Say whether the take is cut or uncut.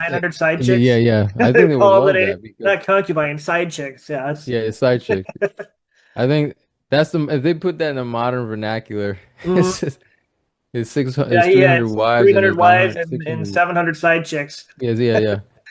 uncut